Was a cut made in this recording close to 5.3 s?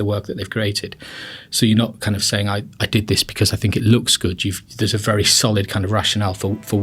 yes; 1 cut; at 5.3 s

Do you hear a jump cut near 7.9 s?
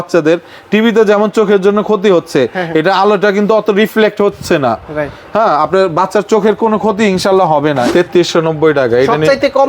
yes; 1 cut; at 7.9 s

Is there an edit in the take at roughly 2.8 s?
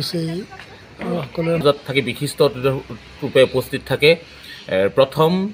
no; 1 cut; at 1.6 s

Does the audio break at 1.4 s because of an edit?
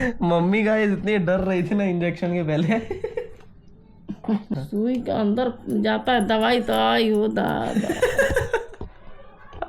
no; 1 cut; at 4.6 s

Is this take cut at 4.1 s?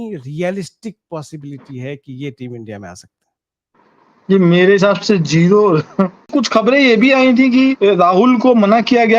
no; 2 cuts; at 6.3 s, 7.8 s

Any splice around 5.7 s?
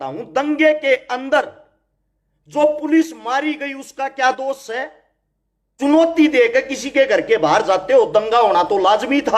yes; 1 cut; at 5.7 s

